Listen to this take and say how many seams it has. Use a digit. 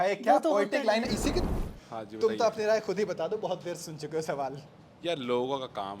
1